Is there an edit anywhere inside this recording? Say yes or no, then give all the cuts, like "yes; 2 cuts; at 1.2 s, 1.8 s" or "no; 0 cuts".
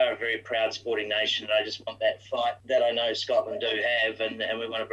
yes; 1 cut; at 2.6 s